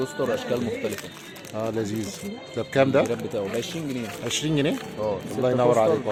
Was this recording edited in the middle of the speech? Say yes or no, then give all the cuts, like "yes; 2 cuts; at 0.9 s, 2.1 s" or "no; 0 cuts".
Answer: no; 0 cuts